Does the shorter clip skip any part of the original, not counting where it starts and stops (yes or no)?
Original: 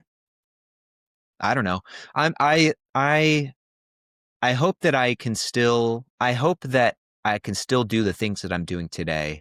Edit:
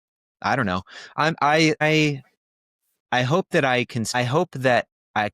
yes